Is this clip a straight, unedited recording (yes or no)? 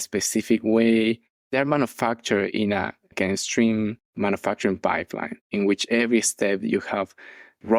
yes